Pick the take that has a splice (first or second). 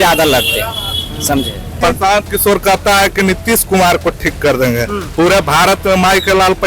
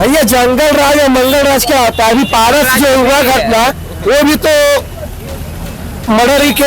first